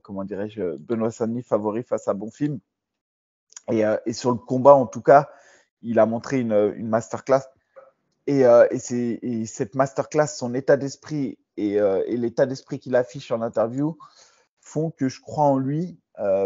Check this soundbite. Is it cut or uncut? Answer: uncut